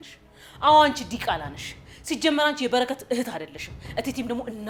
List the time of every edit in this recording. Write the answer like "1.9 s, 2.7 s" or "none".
none